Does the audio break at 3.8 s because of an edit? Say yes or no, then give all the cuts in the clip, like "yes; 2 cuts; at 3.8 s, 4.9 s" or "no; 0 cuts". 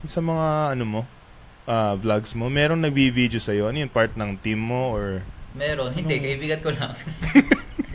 no; 0 cuts